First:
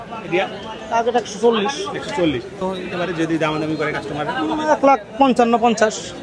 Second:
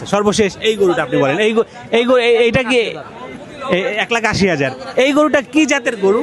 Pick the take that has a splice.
first; 1 cut; at 2.6 s

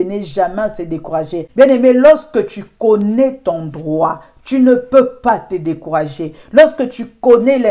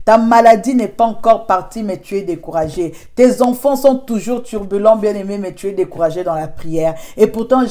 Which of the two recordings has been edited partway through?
first; 1 cut; at 1.4 s

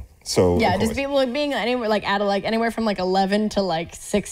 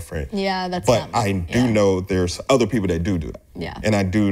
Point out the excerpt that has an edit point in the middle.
second; 1 cut; at 2.4 s

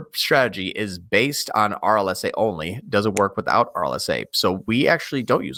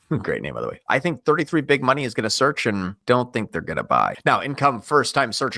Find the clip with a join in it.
second; 2 cuts; at 3.0 s, 4.2 s

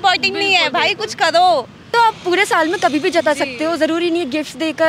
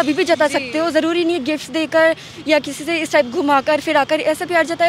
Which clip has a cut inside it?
first; 1 cut; at 1.9 s

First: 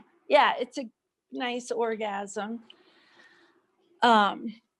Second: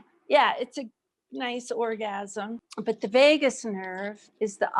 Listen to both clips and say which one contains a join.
second; 1 cut; at 2.6 s

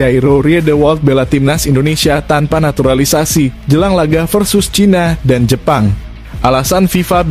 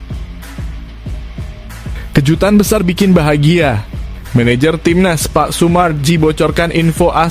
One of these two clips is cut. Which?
second; 1 cut; at 2.1 s

